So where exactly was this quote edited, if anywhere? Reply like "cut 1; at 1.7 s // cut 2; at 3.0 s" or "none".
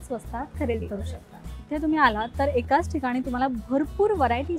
cut 1; at 1.7 s